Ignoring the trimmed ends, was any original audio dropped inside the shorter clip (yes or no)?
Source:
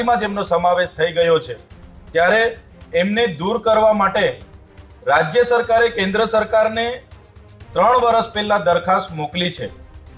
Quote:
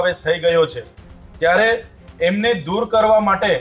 no